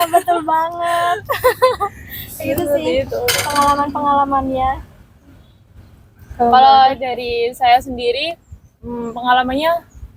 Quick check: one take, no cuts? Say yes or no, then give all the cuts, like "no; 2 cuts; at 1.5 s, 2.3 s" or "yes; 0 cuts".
yes; 0 cuts